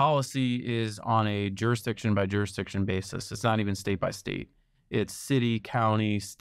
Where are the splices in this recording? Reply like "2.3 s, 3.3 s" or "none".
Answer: none